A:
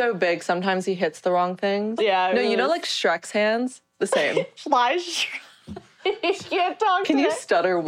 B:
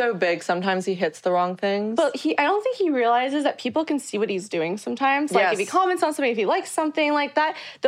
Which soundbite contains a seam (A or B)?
A